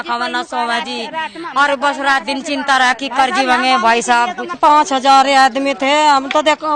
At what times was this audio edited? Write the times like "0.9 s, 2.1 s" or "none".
4.6 s